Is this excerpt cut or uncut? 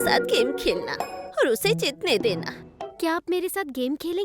cut